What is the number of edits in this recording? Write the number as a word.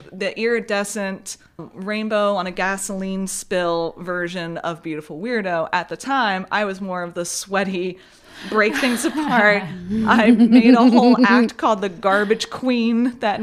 one